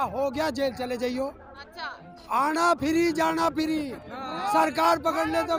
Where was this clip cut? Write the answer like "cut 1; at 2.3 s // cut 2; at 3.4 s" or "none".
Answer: none